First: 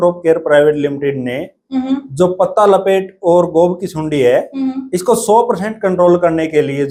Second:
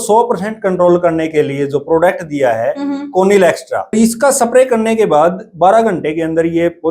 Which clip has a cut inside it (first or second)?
second